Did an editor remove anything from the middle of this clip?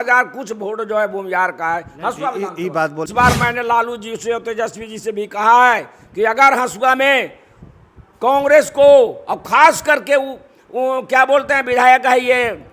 yes; 1 cut; at 3.1 s

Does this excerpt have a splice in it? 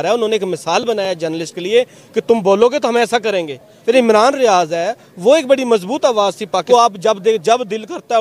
yes; 2 cuts; at 3.7 s, 6.6 s

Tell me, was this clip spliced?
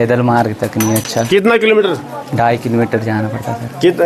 no; 0 cuts

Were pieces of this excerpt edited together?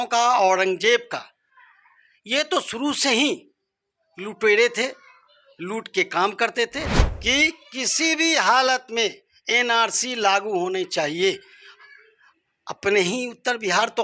yes; 1 cut; at 6.8 s

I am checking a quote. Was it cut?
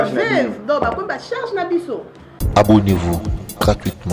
yes; 1 cut; at 2.4 s

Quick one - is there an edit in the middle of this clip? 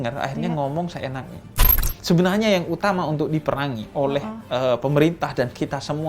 yes; 1 cut; at 1.7 s

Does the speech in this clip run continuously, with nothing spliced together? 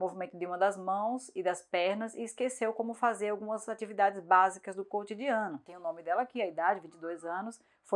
yes; 0 cuts

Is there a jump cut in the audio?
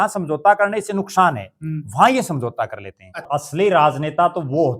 yes; 1 cut; at 3.3 s

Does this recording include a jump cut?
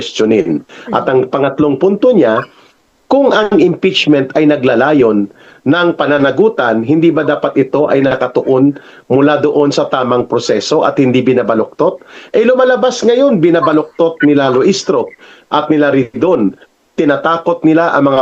no; 0 cuts

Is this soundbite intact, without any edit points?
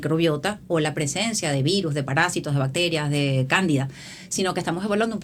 yes; 0 cuts

